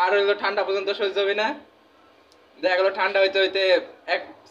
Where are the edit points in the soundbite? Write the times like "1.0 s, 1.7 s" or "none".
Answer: none